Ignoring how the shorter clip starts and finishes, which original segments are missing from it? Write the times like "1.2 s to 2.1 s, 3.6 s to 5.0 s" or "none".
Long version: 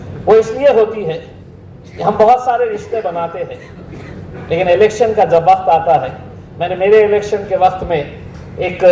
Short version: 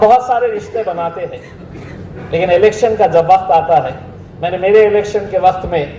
none